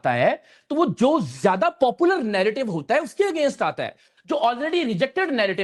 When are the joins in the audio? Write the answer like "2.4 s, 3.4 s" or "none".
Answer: none